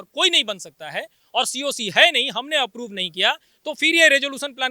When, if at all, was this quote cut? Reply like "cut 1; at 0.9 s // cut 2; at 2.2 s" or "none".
none